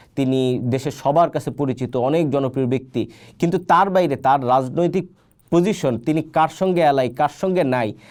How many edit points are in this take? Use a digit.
0